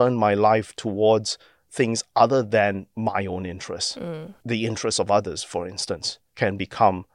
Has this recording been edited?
no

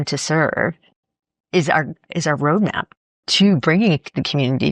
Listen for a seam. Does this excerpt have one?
no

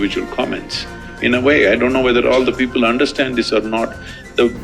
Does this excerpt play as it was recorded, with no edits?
no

